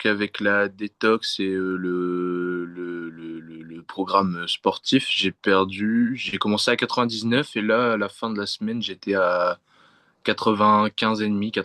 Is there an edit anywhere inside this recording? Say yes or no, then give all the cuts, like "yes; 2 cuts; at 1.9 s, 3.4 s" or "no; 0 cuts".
no; 0 cuts